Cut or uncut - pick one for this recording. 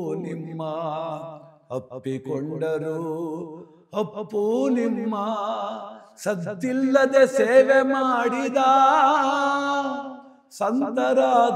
uncut